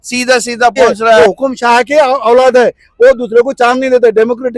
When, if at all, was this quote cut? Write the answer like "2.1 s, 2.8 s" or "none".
1.2 s